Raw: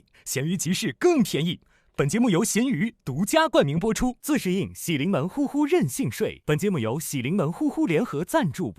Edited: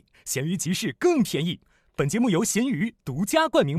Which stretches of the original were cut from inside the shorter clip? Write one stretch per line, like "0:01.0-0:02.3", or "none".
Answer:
none